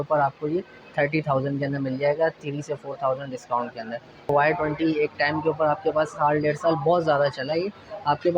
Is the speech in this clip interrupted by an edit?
yes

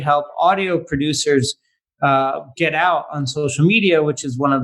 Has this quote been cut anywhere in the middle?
no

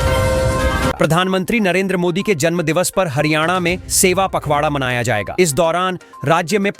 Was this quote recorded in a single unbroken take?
no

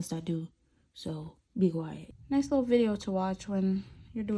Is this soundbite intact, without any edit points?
no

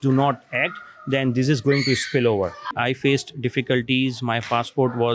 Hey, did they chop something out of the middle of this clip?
yes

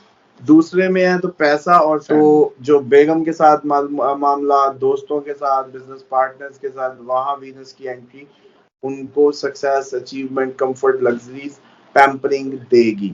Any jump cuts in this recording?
yes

